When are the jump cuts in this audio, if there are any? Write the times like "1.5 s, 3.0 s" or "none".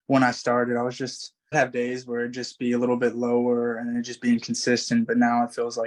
1.5 s